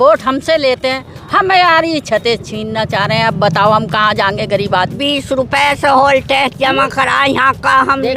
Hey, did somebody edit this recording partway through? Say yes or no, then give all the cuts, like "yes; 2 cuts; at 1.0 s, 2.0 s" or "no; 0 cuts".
yes; 1 cut; at 5.0 s